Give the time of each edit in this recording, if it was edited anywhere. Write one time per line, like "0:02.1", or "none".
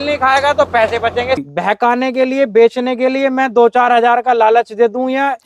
0:01.5